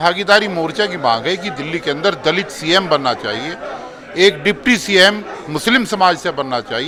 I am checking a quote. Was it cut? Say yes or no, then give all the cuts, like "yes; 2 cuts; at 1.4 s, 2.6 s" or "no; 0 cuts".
no; 0 cuts